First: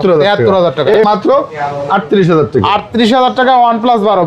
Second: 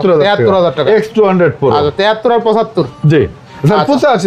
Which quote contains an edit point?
first; 1 cut; at 1.0 s

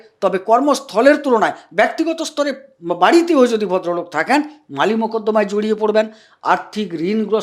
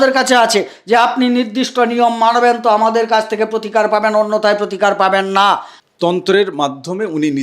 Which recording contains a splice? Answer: second; 1 cut; at 5.7 s

